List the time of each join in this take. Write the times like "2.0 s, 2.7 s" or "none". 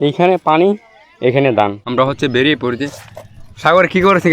1.8 s